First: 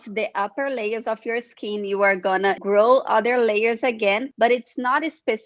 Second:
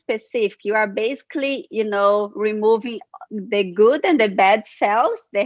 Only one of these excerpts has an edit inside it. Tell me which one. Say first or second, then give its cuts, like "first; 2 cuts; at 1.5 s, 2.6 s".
first; 2 cuts; at 2.6 s, 4.3 s